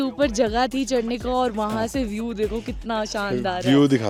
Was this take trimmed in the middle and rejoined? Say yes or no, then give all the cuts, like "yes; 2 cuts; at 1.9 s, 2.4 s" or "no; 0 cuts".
no; 0 cuts